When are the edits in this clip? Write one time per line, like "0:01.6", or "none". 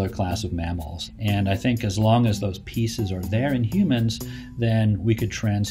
0:01.0

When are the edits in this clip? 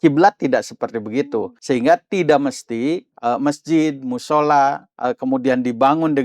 0:01.6
0:03.1
0:04.9

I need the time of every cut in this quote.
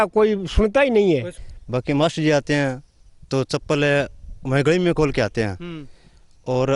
0:01.3

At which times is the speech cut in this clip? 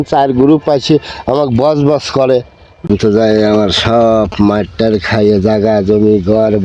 0:02.9

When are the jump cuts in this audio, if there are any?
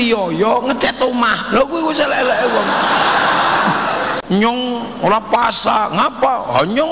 0:04.2

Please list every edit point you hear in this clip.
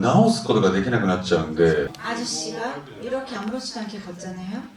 0:02.0

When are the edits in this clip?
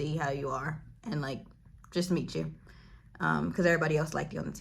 none

